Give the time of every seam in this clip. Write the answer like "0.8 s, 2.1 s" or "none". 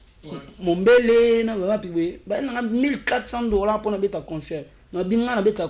none